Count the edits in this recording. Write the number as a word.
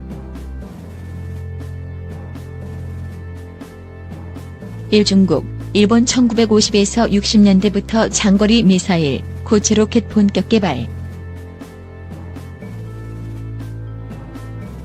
zero